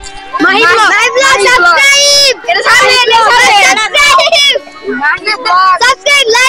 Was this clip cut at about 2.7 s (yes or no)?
no